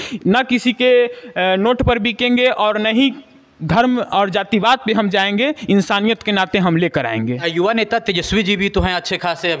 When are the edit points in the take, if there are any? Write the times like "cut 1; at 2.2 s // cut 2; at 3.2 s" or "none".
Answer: none

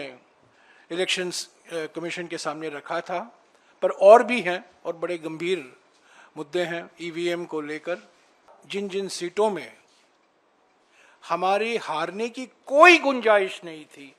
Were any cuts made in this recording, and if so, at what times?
cut 1; at 8.6 s

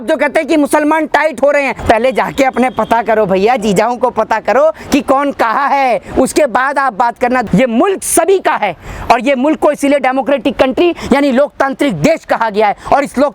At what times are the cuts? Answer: cut 1; at 1.8 s // cut 2; at 7.4 s

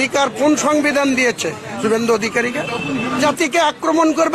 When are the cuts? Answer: cut 1; at 3.2 s

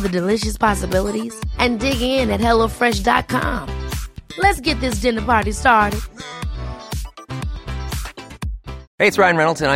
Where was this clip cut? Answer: cut 1; at 8.8 s

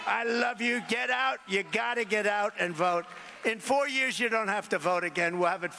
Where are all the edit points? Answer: none

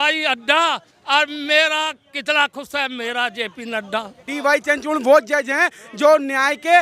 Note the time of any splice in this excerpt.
cut 1; at 4.3 s

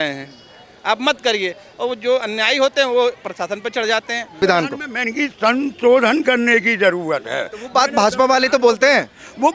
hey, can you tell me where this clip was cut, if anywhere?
cut 1; at 4.4 s

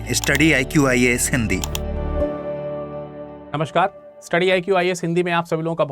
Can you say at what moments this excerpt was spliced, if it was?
cut 1; at 3.4 s

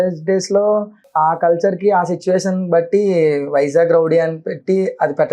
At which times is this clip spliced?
cut 1; at 1.1 s

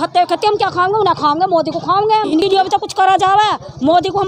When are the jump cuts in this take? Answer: cut 1; at 2.4 s

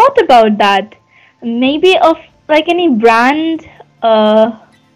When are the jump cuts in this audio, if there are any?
none

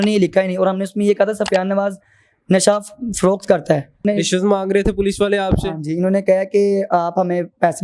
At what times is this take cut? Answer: cut 1; at 4.0 s

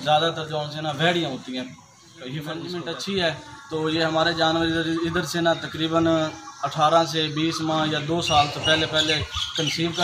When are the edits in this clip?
cut 1; at 2.6 s

